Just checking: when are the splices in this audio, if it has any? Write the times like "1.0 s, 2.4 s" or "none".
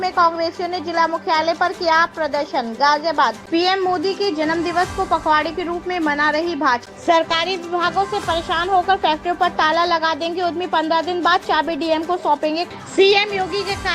3.4 s, 6.9 s, 12.7 s